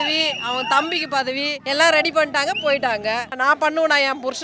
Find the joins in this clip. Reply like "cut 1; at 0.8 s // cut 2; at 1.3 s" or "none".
cut 1; at 1.6 s // cut 2; at 3.4 s